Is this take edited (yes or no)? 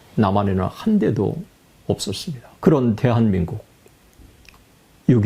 yes